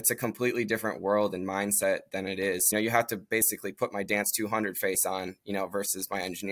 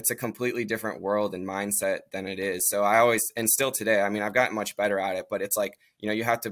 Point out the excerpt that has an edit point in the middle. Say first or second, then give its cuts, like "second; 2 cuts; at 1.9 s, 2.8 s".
first; 1 cut; at 2.6 s